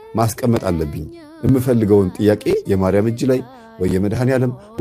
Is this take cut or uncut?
uncut